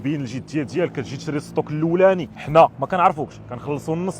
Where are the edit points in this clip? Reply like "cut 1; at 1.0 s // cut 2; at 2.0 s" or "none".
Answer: cut 1; at 2.3 s